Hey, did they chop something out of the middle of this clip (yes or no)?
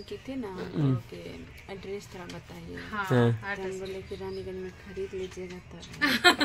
no